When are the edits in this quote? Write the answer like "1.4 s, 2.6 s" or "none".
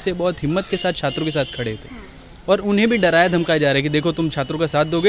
none